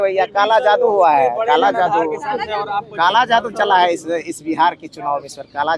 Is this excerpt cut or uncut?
uncut